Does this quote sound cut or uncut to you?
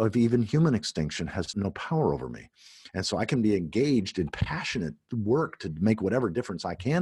cut